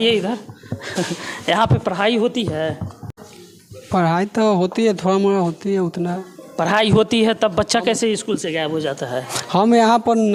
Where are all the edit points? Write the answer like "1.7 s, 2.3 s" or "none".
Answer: none